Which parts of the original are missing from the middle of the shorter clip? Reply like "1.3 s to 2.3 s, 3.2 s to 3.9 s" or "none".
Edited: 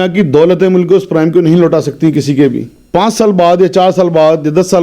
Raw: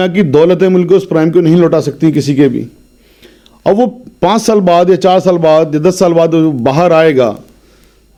2.8 s to 4.0 s